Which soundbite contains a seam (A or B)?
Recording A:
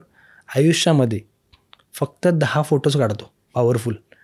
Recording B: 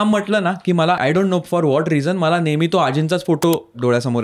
B